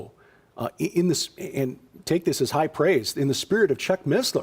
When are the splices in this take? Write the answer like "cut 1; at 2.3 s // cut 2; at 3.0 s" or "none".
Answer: cut 1; at 0.9 s